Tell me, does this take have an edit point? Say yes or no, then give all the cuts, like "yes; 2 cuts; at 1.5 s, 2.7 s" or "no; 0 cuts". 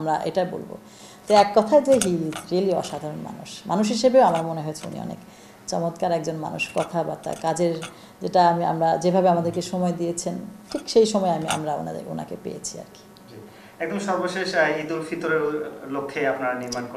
no; 0 cuts